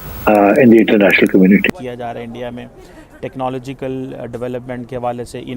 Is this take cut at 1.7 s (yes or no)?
yes